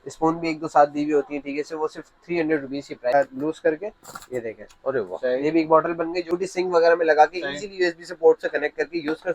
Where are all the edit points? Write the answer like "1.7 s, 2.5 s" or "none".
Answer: 3.1 s, 6.3 s